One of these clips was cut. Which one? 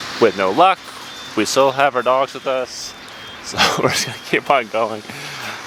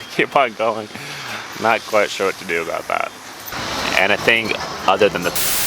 second; 1 cut; at 3.5 s

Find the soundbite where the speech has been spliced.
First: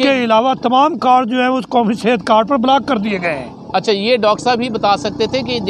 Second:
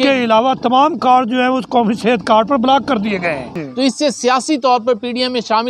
second; 1 cut; at 3.5 s

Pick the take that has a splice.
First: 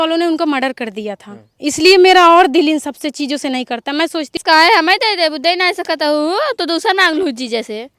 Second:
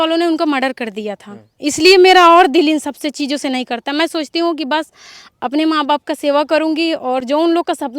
first; 1 cut; at 4.4 s

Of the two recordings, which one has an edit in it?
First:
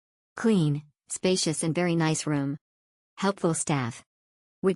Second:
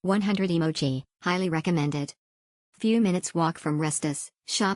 second; 1 cut; at 1.0 s

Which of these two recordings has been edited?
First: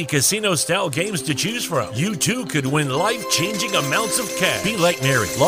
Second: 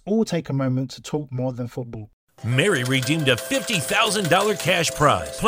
second; 1 cut; at 2.0 s

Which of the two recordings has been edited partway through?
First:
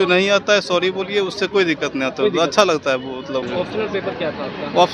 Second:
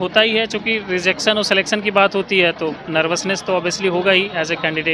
first; 1 cut; at 3.4 s

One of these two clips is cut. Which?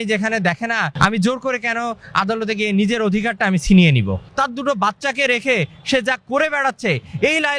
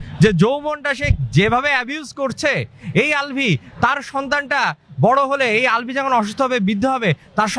first; 2 cuts; at 0.9 s, 4.2 s

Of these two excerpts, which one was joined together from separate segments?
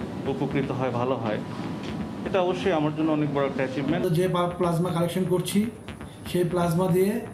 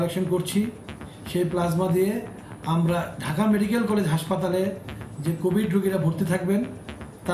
first; 1 cut; at 4.0 s

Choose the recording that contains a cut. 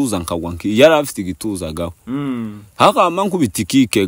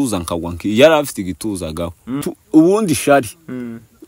second; 1 cut; at 2.1 s

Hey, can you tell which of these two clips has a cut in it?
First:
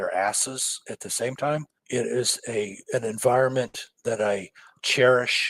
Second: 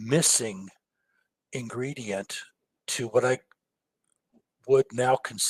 first; 1 cut; at 1.8 s

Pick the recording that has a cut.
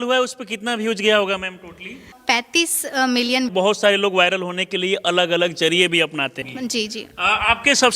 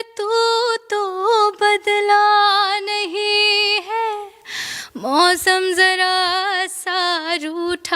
first; 3 cuts; at 2.2 s, 3.5 s, 6.5 s

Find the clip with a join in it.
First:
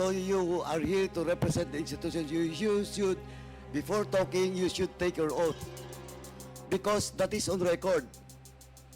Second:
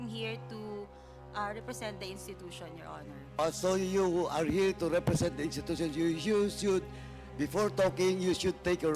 first; 1 cut; at 8.0 s

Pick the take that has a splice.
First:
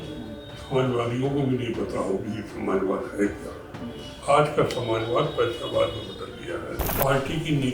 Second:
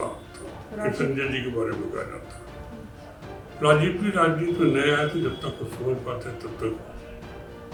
first; 1 cut; at 6.8 s

